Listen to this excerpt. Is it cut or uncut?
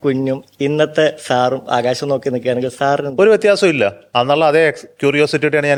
uncut